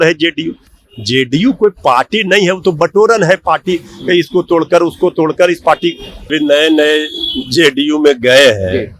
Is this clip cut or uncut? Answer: cut